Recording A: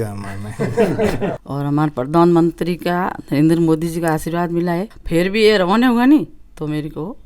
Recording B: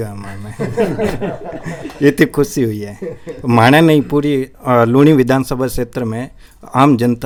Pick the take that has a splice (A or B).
A